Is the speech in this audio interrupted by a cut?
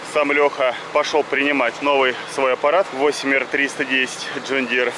yes; 3 cuts; at 0.8 s, 1.8 s, 2.9 s

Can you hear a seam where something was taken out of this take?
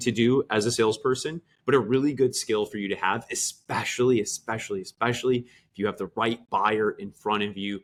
no; 0 cuts

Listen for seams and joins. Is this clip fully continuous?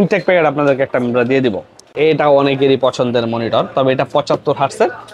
no; 1 cut; at 1.9 s

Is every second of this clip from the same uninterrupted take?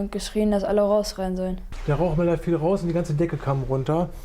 no; 1 cut; at 1.7 s

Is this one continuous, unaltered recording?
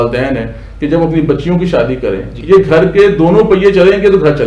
no; 1 cut; at 2.3 s

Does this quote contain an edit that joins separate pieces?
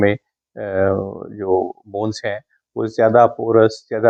no; 0 cuts

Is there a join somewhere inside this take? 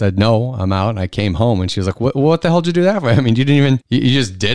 no; 0 cuts

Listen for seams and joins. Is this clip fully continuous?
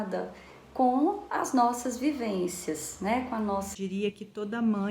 no; 1 cut; at 3.7 s

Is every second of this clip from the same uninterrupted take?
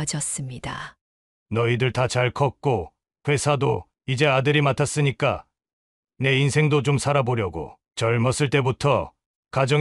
yes; 0 cuts

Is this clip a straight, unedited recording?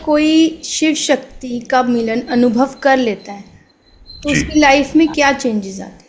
yes; 0 cuts

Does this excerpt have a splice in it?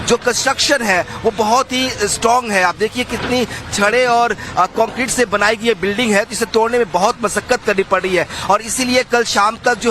yes; 1 cut; at 2.5 s

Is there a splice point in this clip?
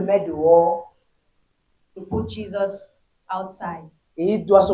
no; 0 cuts

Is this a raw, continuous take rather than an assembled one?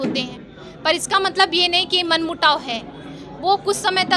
yes; 0 cuts

